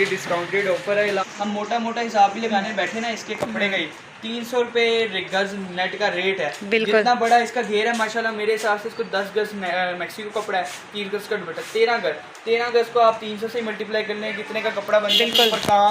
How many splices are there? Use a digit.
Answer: 1